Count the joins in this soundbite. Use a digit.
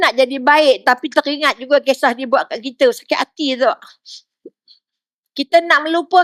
0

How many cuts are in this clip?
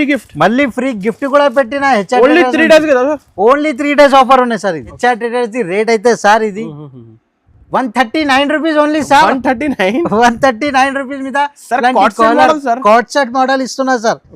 1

